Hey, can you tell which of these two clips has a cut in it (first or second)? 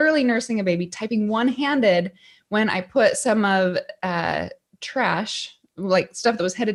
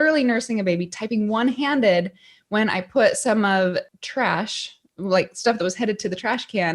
second